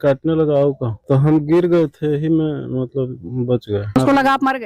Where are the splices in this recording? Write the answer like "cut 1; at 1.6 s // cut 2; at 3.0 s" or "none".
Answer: cut 1; at 1.0 s // cut 2; at 4.0 s